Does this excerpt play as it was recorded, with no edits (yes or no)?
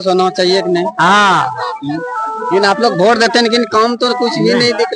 yes